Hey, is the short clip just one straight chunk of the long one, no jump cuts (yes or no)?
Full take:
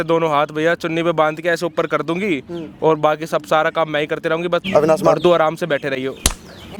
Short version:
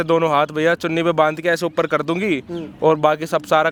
yes